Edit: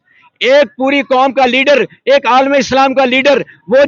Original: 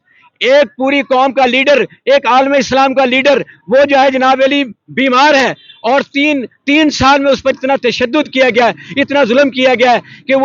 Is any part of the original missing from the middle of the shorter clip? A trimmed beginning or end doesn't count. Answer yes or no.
no